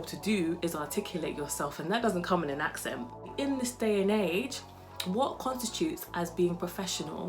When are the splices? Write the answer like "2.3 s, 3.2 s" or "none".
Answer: 3.2 s